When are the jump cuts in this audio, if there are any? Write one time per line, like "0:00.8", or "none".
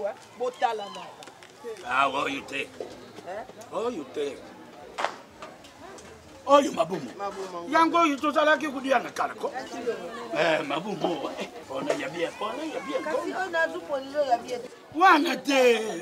0:01.8
0:11.6